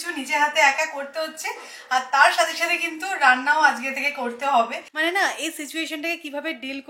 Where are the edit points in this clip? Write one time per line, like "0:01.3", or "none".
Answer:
0:04.8